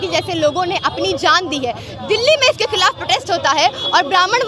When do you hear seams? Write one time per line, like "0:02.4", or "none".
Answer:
none